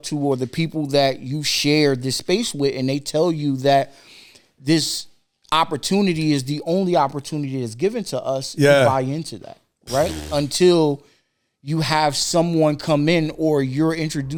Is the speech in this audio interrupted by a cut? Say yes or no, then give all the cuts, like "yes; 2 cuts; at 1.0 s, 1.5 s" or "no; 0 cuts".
no; 0 cuts